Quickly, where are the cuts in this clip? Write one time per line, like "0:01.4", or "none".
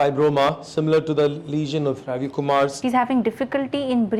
0:02.8